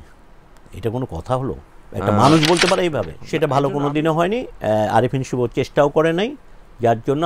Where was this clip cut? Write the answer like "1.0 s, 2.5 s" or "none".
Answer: 3.1 s